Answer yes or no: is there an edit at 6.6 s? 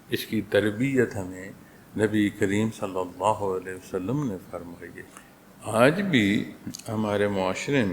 no